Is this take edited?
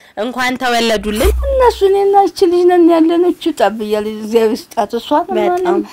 yes; 1 cut; at 1.3 s

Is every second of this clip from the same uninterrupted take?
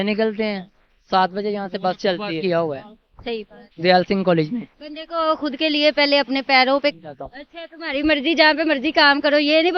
no; 2 cuts; at 2.4 s, 6.9 s

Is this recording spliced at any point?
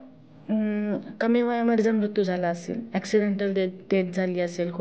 no; 0 cuts

